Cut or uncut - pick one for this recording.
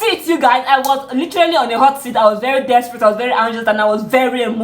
uncut